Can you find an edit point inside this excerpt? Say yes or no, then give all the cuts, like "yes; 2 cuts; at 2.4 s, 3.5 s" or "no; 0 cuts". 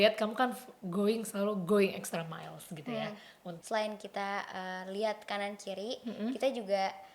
yes; 1 cut; at 3.5 s